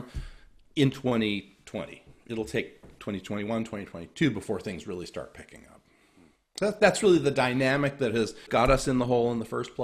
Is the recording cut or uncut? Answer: cut